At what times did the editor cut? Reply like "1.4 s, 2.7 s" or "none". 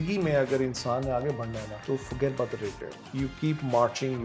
1.7 s, 3.0 s